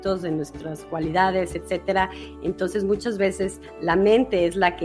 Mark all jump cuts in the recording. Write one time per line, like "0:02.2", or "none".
none